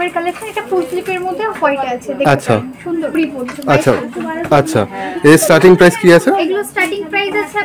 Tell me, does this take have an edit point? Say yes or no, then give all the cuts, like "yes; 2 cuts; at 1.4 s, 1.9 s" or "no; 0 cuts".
yes; 1 cut; at 3.1 s